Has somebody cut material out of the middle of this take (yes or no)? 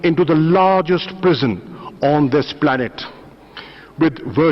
no